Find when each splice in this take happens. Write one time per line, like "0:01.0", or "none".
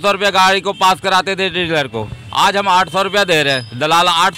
none